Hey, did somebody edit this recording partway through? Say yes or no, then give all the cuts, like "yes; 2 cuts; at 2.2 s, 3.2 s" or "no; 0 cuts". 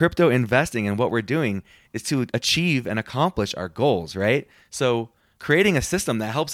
yes; 2 cuts; at 2.1 s, 4.9 s